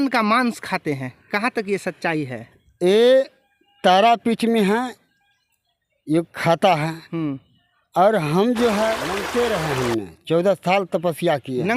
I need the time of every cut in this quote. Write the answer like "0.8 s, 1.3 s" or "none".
9.1 s